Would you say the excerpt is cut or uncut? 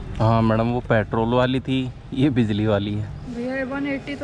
cut